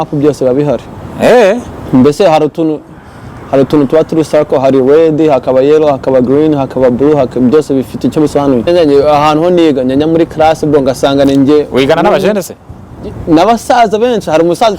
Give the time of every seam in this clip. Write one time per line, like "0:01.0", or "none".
0:08.7

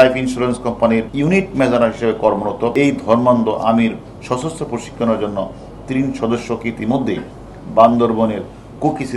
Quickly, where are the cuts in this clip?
0:01.1
0:02.7

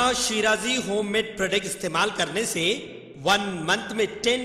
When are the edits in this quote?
none

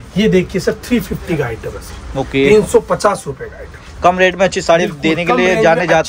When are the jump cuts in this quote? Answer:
none

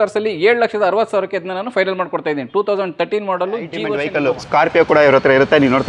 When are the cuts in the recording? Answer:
0:04.0

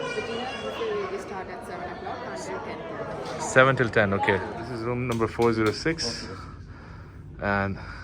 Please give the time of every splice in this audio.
0:04.7

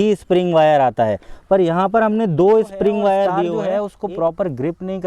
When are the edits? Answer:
0:03.6

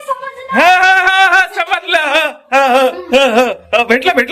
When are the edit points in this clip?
none

